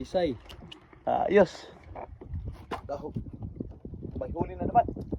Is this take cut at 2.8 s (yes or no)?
yes